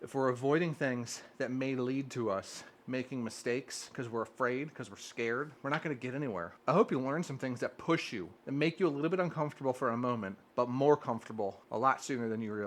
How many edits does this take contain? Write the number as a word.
five